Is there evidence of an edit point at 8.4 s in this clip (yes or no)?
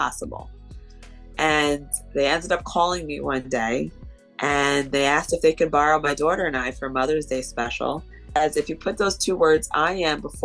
yes